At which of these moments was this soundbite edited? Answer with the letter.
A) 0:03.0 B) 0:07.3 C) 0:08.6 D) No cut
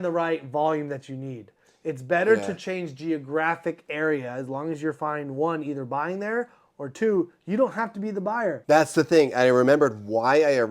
C